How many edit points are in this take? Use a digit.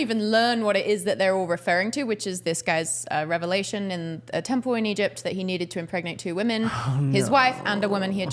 0